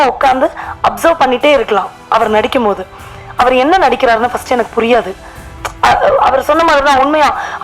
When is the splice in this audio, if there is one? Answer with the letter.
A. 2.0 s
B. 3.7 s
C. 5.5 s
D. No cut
D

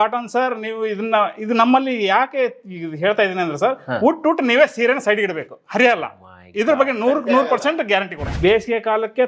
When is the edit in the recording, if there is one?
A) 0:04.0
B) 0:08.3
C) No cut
B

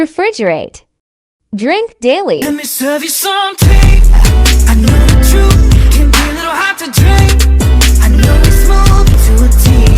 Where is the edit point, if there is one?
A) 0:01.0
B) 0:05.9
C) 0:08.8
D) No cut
D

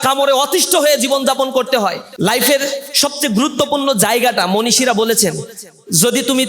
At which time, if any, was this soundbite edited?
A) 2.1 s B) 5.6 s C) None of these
A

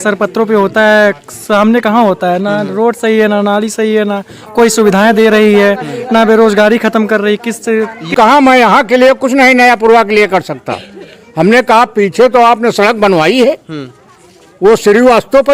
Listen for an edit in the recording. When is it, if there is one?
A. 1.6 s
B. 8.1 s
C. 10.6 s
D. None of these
B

